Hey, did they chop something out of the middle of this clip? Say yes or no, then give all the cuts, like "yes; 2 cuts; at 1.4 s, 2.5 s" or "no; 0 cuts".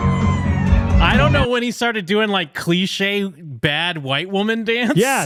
no; 0 cuts